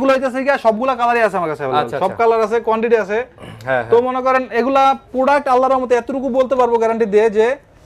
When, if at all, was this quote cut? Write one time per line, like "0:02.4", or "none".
none